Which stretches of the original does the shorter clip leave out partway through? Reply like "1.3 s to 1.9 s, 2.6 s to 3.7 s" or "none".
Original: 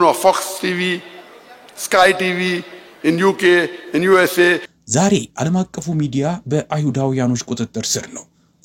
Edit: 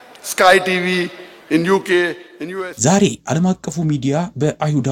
4.0 s to 4.6 s